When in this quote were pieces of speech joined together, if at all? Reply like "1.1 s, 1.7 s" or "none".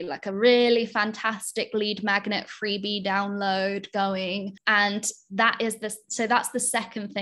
4.6 s